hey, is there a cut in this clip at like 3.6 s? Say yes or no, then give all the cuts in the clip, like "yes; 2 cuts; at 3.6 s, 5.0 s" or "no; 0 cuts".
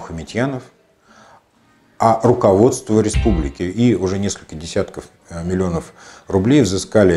yes; 1 cut; at 3.6 s